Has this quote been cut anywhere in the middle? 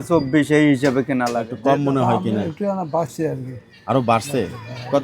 yes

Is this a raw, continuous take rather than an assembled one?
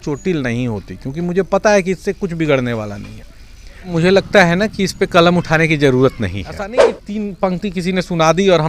no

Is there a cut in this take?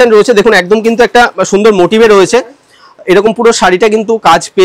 no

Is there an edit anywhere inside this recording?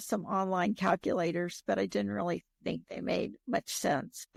no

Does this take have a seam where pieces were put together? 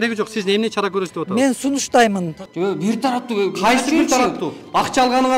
yes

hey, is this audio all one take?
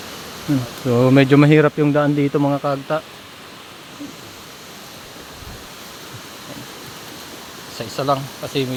yes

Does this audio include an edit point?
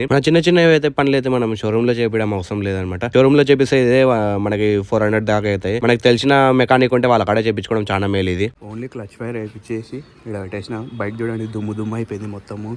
no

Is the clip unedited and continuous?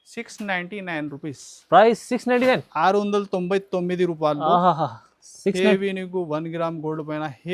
yes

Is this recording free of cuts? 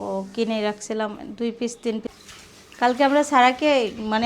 no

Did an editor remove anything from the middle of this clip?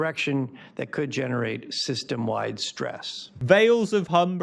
yes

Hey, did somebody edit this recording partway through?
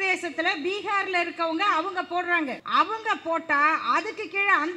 yes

